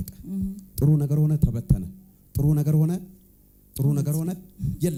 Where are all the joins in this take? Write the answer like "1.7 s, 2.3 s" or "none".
none